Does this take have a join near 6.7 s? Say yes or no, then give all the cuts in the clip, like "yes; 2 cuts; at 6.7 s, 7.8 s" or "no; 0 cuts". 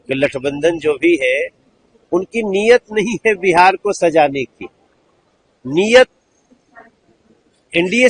no; 0 cuts